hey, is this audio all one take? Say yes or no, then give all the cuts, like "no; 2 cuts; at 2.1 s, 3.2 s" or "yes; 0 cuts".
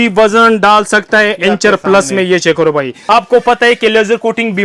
no; 1 cut; at 3.0 s